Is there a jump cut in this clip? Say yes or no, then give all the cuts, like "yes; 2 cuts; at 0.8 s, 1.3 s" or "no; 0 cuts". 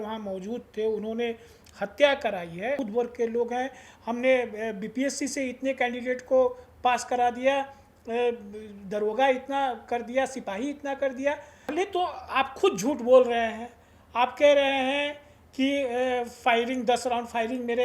yes; 2 cuts; at 2.8 s, 11.7 s